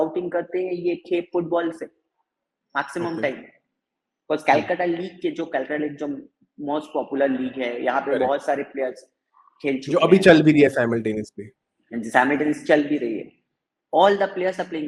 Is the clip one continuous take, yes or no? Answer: yes